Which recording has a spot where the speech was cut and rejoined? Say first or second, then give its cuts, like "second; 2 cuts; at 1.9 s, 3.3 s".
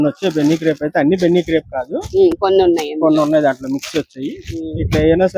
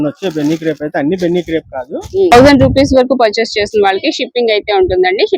second; 1 cut; at 2.3 s